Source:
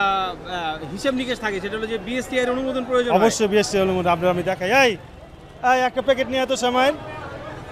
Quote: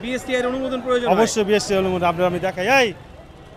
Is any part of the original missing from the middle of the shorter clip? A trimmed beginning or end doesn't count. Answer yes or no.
no